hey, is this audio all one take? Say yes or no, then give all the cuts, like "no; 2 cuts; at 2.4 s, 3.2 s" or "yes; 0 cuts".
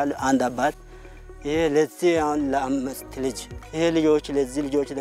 no; 1 cut; at 3.6 s